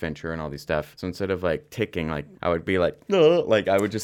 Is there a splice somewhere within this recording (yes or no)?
yes